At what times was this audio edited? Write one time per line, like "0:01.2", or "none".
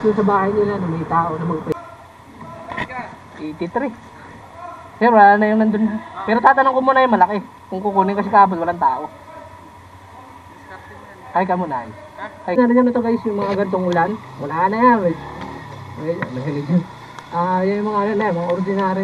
0:01.8
0:12.6